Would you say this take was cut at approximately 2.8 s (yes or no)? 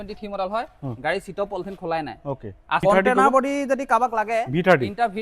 yes